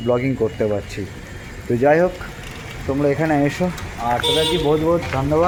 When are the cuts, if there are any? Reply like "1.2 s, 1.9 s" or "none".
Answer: none